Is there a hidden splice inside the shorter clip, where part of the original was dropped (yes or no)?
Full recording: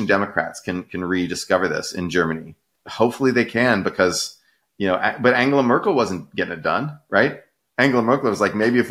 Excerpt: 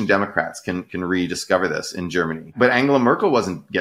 yes